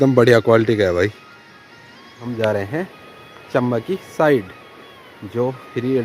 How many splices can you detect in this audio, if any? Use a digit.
1